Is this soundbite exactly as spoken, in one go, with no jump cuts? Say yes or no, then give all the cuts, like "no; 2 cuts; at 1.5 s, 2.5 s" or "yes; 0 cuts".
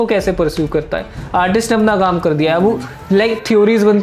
yes; 0 cuts